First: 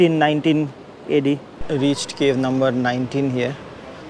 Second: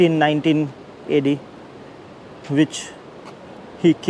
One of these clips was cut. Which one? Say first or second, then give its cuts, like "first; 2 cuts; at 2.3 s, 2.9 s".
first; 1 cut; at 1.5 s